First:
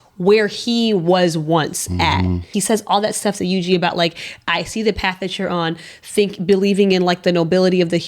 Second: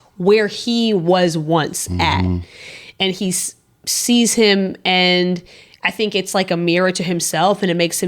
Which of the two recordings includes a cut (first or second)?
first